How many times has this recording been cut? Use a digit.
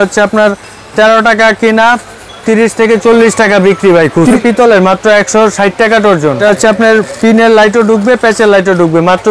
2